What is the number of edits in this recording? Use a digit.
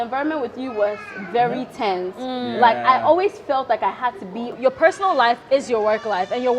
1